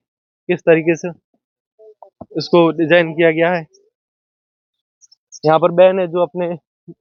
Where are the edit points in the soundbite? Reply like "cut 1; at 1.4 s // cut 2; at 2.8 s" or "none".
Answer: none

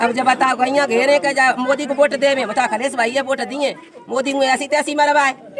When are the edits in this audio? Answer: none

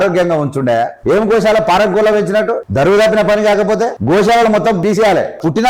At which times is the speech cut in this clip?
cut 1; at 0.9 s // cut 2; at 2.6 s // cut 3; at 4.0 s // cut 4; at 4.9 s

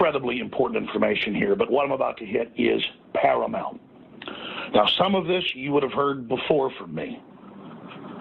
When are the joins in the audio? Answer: cut 1; at 5.1 s

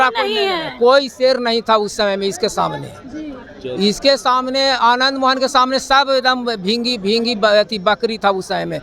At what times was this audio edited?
none

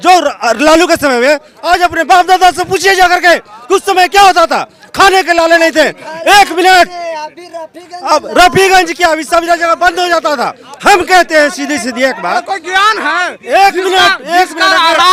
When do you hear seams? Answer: none

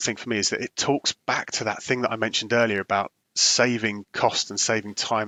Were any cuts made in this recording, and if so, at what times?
none

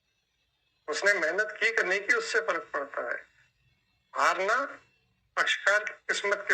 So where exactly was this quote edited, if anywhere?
none

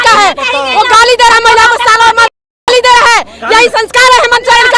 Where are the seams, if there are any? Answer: none

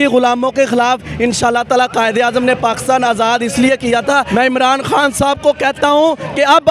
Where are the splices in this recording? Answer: cut 1; at 4.3 s

